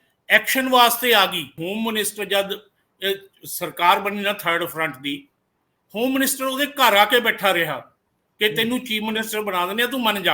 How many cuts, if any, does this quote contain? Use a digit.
1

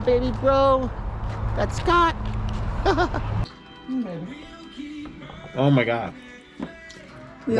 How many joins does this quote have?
1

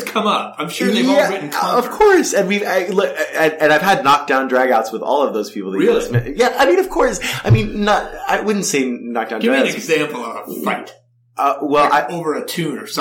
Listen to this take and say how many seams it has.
0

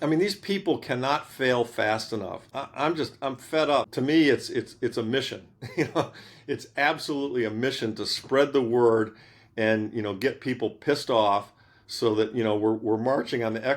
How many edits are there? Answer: 2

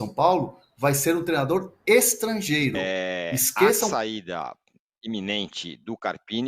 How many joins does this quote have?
1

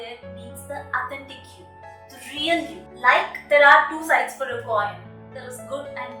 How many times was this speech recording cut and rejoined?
1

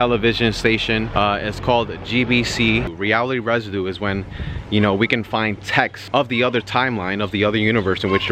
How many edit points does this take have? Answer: 3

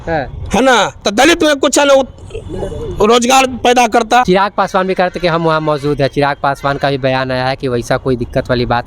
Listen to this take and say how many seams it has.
1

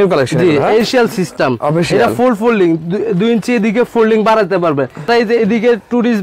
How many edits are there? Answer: 2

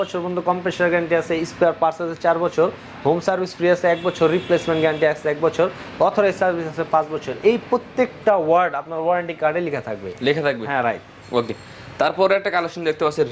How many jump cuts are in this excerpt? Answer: 0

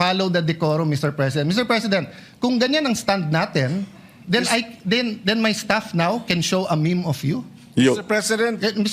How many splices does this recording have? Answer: 1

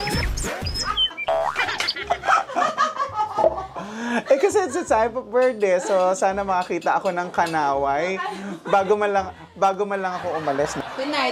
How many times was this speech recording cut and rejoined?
0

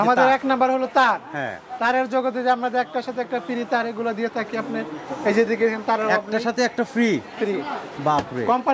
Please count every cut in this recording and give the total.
0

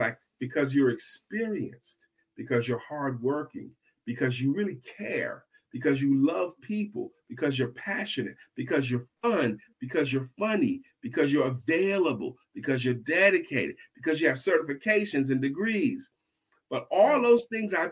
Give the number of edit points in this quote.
1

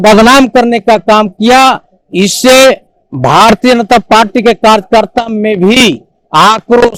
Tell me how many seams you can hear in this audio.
0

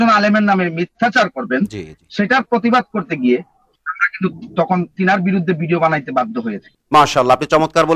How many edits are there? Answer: 0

